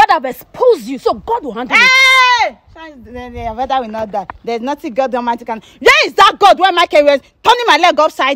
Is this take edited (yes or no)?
no